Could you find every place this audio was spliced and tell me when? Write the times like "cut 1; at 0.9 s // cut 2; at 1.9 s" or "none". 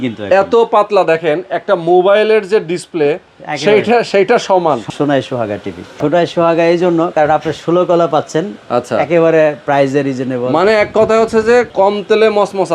cut 1; at 4.8 s // cut 2; at 6.0 s // cut 3; at 11.7 s

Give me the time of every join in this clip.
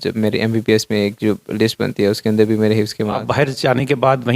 cut 1; at 3.2 s

